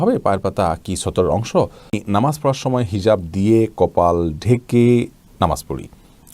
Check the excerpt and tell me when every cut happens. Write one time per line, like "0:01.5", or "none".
0:02.0